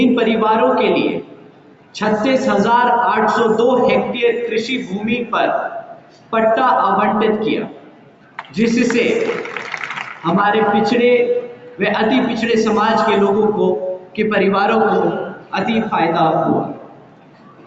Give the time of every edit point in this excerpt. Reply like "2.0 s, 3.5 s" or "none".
none